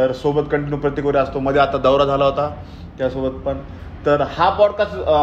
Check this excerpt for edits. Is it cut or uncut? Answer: uncut